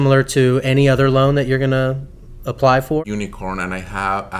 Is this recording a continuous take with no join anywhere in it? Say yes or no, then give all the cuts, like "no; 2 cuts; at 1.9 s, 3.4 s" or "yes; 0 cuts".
no; 1 cut; at 3.0 s